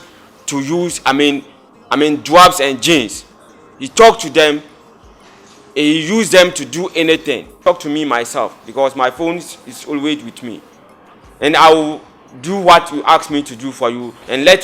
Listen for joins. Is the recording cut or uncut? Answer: cut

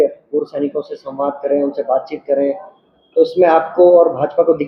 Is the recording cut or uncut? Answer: uncut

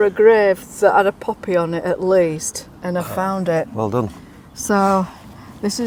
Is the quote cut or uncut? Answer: uncut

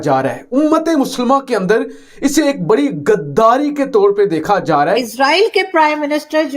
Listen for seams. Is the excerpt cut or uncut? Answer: cut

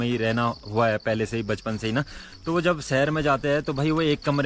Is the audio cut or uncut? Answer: uncut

